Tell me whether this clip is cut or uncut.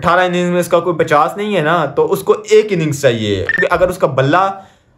cut